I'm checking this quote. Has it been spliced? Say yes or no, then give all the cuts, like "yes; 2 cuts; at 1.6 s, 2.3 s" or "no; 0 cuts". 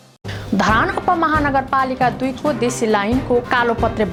no; 0 cuts